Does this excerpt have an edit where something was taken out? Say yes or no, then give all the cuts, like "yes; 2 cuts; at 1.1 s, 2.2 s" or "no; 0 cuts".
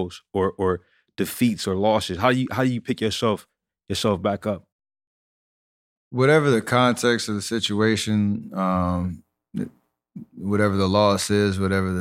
no; 0 cuts